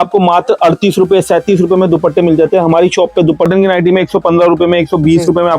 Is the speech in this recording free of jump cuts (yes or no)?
no